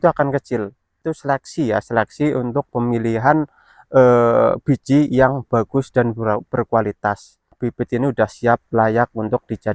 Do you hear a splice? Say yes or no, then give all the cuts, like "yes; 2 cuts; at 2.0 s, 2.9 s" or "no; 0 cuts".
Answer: yes; 2 cuts; at 1.0 s, 7.6 s